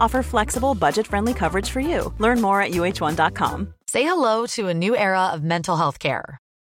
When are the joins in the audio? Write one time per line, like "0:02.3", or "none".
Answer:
0:03.7